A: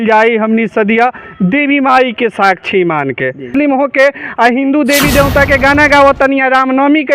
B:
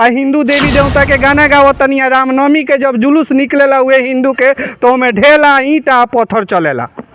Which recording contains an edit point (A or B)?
A